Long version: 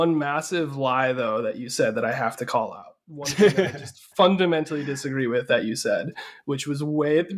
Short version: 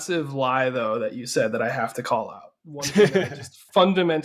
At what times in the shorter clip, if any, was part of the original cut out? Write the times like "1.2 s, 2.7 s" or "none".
none